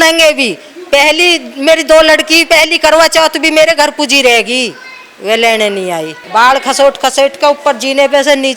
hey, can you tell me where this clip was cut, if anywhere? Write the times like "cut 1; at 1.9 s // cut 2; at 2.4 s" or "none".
cut 1; at 6.2 s